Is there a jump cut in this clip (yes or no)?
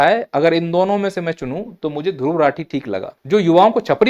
yes